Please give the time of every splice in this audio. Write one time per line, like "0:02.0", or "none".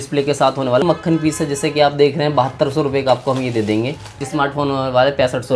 0:00.8
0:04.2